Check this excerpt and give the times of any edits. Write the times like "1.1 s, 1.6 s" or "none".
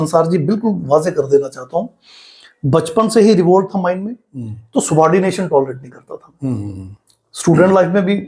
none